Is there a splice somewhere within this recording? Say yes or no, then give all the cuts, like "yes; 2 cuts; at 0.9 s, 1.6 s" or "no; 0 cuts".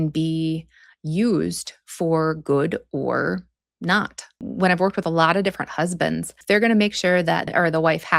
yes; 3 cuts; at 4.3 s, 6.3 s, 7.5 s